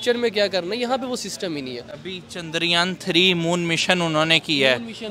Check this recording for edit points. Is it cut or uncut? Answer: uncut